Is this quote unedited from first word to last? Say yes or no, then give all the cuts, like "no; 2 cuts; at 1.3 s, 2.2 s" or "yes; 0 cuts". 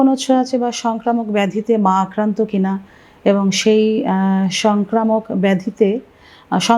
yes; 0 cuts